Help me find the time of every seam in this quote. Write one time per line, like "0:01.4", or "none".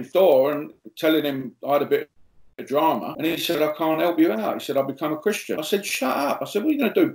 0:05.6